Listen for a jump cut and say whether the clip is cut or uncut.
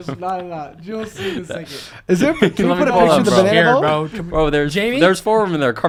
uncut